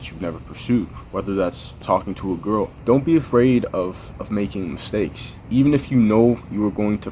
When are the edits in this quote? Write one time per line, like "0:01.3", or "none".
0:01.8
0:03.0